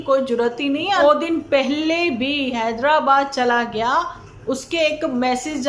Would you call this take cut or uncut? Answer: cut